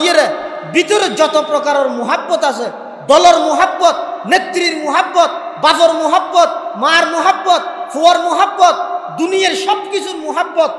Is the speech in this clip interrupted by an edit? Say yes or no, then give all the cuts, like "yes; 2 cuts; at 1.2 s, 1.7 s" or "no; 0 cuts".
no; 0 cuts